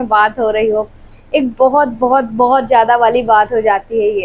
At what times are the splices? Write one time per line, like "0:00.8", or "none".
none